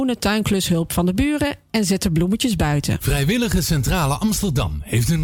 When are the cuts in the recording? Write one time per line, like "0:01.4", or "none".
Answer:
0:03.0